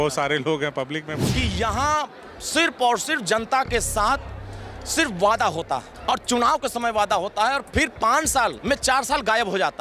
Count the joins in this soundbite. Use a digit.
3